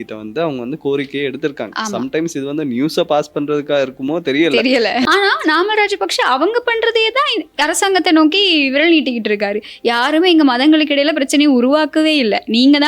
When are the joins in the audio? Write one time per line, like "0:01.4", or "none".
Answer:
0:05.1